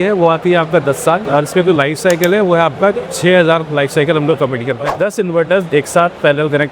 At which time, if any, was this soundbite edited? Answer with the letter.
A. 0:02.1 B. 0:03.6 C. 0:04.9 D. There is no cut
C